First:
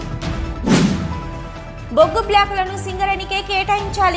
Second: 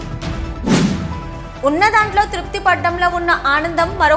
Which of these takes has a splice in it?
first; 1 cut; at 0.9 s

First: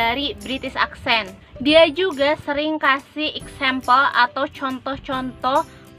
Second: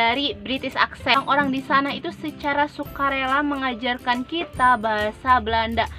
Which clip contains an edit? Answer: second; 1 cut; at 1.2 s

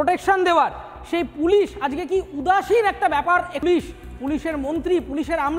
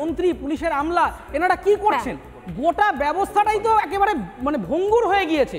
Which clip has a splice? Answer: first; 1 cut; at 3.5 s

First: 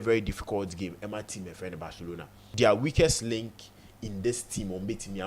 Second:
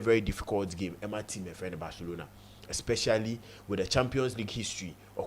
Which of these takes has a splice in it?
first; 1 cut; at 2.4 s

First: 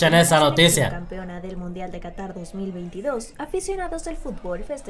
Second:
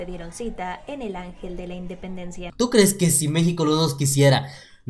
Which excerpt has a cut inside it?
second; 1 cut; at 2.4 s

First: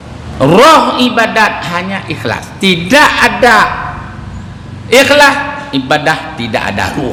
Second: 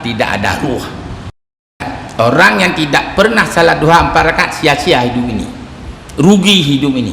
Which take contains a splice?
second; 1 cut; at 1.9 s

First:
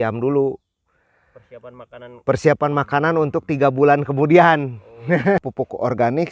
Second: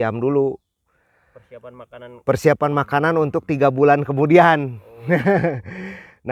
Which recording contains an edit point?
first; 1 cut; at 5.4 s

